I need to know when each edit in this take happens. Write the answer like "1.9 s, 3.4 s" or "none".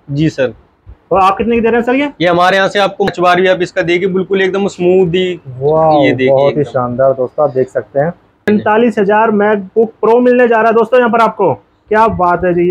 3.1 s, 8.5 s